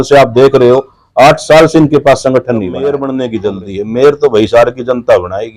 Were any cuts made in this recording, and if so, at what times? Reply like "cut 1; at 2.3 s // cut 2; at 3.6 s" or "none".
cut 1; at 2.9 s